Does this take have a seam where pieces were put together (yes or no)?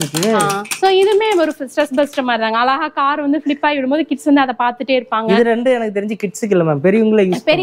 no